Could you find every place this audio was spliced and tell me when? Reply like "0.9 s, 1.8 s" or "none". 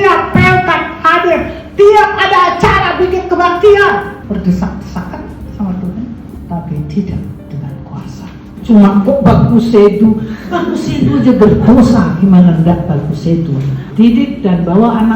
4.2 s, 6.4 s, 8.5 s, 13.8 s